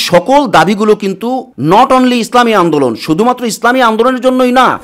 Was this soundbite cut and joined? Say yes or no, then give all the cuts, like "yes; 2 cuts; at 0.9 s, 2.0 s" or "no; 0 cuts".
yes; 1 cut; at 1.5 s